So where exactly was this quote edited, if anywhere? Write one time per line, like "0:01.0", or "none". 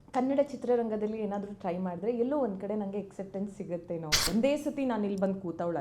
0:04.2